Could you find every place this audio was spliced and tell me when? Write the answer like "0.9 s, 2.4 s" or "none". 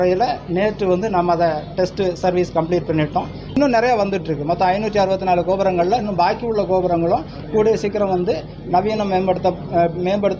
3.5 s